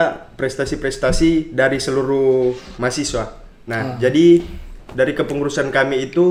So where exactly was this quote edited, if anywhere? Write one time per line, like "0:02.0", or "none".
none